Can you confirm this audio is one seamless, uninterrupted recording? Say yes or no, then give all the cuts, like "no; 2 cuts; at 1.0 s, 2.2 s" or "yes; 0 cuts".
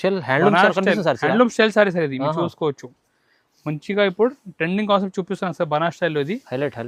yes; 0 cuts